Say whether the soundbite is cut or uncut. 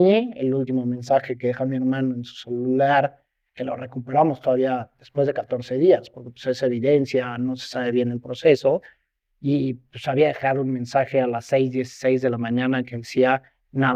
uncut